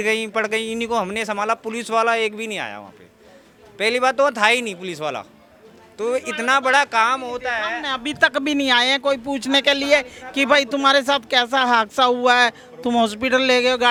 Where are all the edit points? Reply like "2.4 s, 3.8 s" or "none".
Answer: none